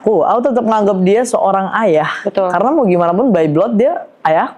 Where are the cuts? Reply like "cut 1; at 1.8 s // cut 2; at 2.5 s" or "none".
none